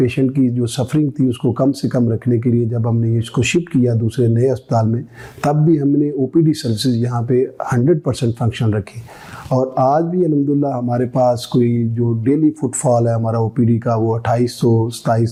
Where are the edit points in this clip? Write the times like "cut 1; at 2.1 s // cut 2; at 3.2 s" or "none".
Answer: none